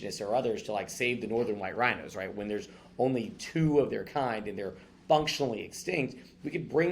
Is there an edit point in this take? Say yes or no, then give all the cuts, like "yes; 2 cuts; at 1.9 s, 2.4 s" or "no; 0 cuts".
no; 0 cuts